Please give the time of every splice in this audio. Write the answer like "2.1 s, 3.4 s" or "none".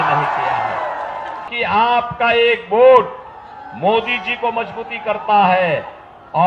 1.5 s